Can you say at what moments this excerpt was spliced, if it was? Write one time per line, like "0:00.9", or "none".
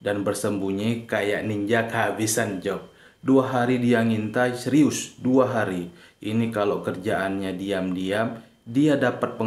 none